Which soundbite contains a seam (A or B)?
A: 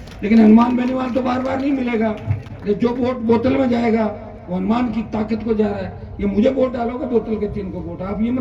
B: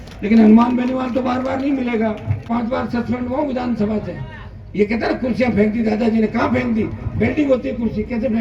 B